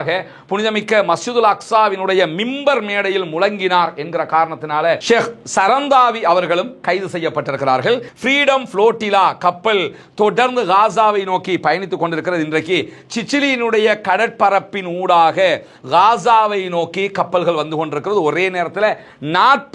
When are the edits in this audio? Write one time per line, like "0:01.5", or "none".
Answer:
0:08.1